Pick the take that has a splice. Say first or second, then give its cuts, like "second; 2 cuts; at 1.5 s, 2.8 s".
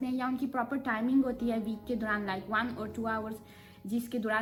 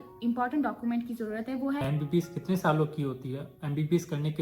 second; 1 cut; at 1.8 s